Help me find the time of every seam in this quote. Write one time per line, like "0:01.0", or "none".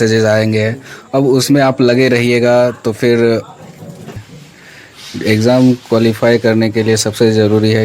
0:04.0